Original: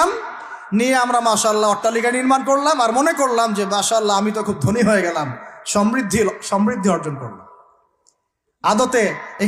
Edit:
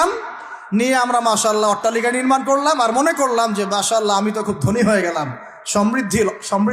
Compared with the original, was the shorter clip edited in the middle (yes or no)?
no